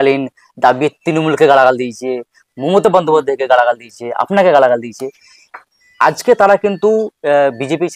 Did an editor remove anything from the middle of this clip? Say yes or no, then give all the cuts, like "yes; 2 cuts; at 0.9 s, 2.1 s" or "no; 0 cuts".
no; 0 cuts